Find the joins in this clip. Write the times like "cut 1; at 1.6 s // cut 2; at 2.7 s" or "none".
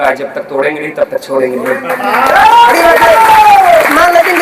none